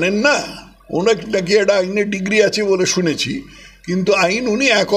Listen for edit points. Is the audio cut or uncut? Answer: uncut